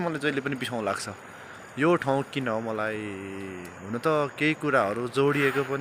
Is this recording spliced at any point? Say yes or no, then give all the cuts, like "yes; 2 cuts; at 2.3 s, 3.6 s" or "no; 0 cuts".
no; 0 cuts